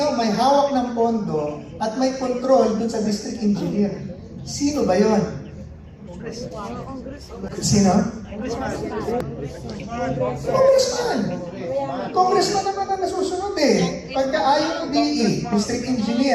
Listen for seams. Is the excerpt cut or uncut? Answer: uncut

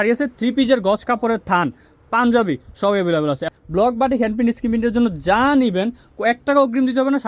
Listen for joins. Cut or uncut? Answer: cut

